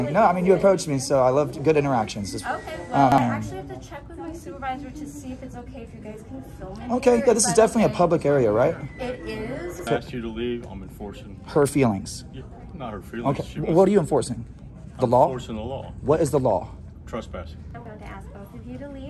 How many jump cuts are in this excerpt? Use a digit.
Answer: 3